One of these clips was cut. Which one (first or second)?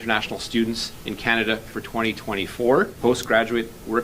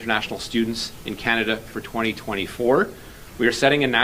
first